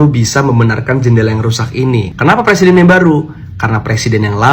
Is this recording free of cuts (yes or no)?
no